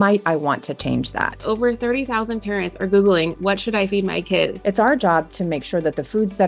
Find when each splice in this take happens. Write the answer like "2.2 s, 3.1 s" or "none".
1.5 s, 4.6 s

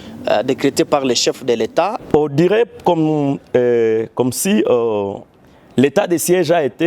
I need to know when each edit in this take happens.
2.0 s

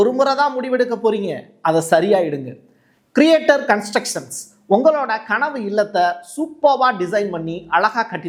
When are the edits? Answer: none

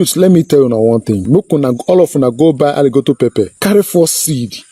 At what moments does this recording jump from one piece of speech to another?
1.3 s, 3.5 s

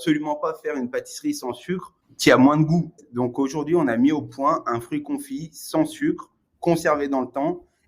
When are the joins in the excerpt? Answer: 3.0 s

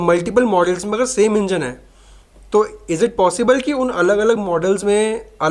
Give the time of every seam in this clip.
none

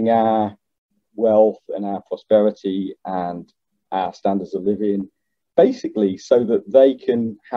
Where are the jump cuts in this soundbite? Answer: none

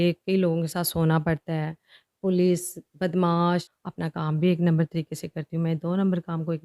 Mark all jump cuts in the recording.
3.8 s

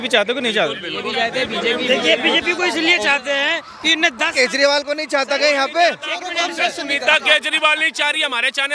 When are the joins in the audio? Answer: none

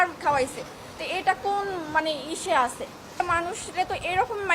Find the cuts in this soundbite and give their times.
3.1 s

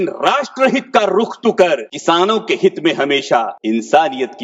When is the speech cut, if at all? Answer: 1.9 s, 3.5 s

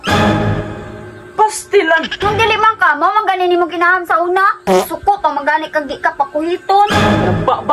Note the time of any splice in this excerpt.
2.2 s

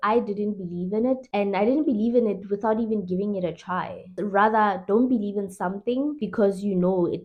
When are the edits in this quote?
none

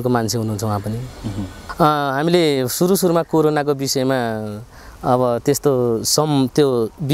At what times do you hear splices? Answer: 1.7 s

